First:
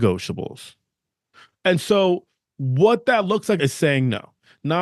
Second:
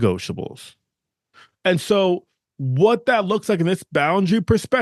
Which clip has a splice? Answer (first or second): first